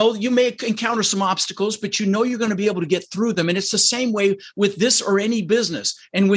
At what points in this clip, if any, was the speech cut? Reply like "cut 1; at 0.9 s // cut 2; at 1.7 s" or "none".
none